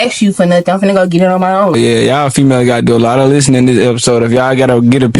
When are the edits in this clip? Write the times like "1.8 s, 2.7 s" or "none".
1.7 s

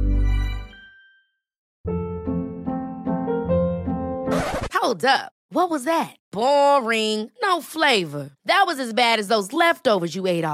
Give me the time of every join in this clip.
1.7 s

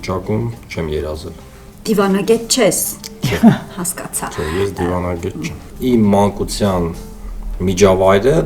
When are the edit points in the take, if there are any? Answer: 5.6 s

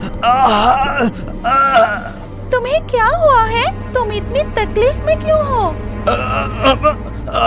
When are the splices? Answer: none

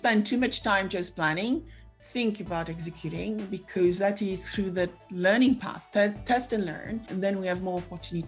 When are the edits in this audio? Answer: 7.1 s

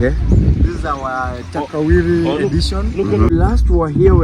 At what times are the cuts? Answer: 3.3 s

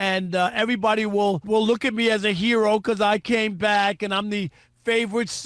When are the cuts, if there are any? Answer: 1.4 s

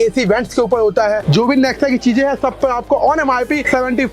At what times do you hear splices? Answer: 1.2 s

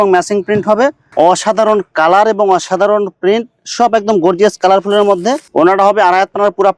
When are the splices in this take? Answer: 1.0 s, 5.5 s

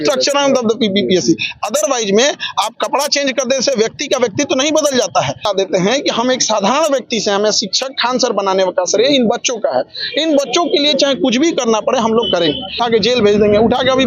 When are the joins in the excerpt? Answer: 5.4 s, 12.8 s

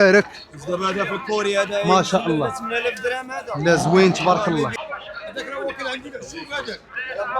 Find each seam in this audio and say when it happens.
4.7 s

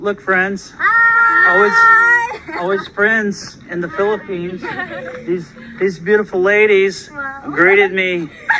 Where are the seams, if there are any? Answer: none

